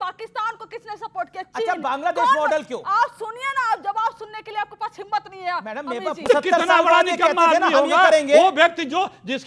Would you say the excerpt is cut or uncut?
cut